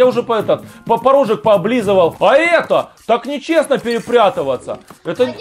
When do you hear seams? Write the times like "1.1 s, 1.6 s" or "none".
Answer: 2.1 s